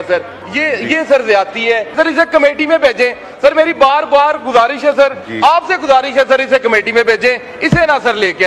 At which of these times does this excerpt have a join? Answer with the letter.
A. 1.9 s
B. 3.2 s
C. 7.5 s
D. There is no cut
A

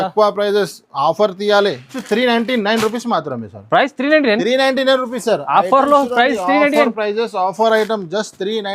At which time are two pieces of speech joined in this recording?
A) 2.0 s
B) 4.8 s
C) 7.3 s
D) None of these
A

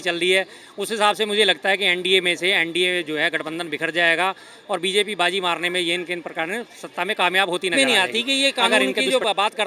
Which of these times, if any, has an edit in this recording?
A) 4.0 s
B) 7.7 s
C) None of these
B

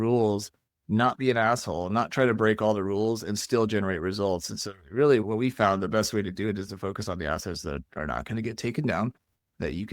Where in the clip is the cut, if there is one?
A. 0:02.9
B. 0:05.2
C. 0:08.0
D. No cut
B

